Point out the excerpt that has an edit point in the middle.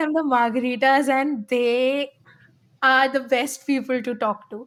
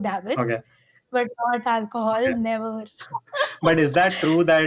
second; 1 cut; at 2.9 s

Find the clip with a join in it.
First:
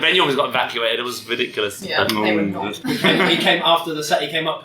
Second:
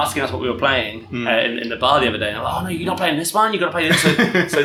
first; 1 cut; at 2.7 s

